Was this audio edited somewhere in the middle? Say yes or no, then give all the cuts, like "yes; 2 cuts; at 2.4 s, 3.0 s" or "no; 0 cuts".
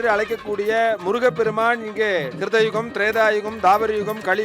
yes; 1 cut; at 2.3 s